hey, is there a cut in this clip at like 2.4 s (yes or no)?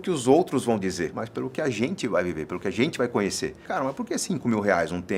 no